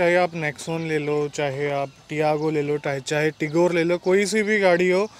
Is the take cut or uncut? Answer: uncut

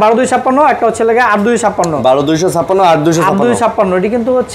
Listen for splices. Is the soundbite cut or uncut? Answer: uncut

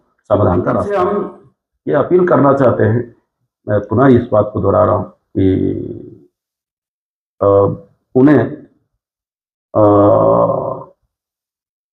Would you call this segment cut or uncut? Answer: cut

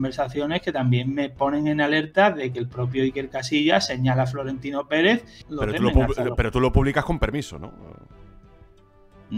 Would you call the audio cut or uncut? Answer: cut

